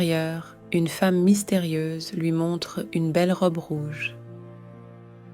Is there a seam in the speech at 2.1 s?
no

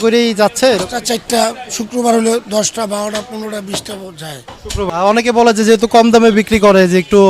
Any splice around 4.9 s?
yes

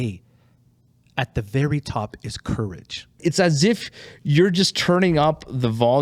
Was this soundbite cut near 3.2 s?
yes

